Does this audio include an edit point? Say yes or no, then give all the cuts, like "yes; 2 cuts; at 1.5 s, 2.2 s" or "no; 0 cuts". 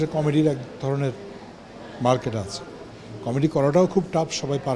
no; 0 cuts